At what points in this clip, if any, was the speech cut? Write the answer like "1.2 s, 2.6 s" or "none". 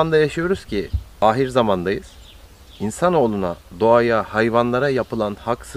1.2 s